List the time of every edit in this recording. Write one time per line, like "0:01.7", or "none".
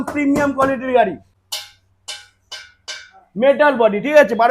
0:01.4